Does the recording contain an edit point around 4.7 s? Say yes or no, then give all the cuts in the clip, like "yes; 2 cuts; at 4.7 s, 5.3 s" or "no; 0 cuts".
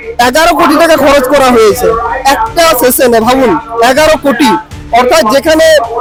no; 0 cuts